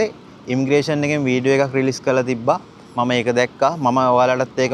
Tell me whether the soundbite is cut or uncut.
uncut